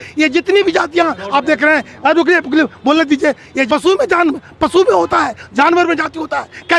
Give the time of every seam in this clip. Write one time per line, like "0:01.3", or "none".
0:03.7